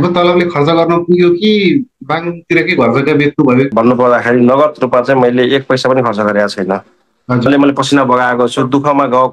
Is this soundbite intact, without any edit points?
no; 2 cuts; at 3.7 s, 7.5 s

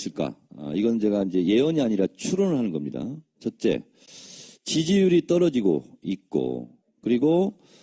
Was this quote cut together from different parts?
yes; 1 cut; at 4.5 s

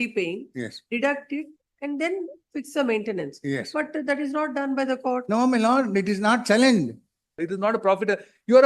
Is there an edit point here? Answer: yes; 1 cut; at 7.4 s

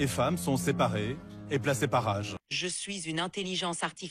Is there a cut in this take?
yes; 1 cut; at 2.4 s

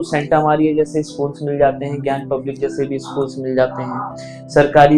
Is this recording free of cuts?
yes; 0 cuts

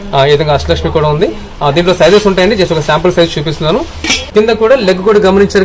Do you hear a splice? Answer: yes; 1 cut; at 4.2 s

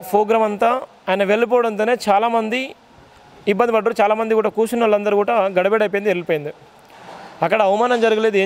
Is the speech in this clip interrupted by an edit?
no; 0 cuts

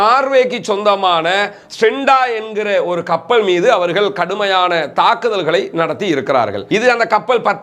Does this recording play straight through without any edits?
no; 1 cut; at 6.7 s

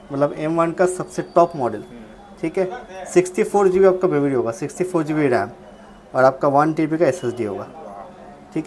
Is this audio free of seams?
yes; 0 cuts

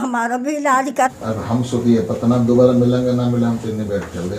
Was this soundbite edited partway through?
yes; 1 cut; at 1.1 s

